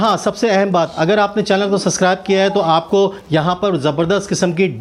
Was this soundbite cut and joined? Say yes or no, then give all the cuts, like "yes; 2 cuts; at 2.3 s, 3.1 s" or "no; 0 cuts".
no; 0 cuts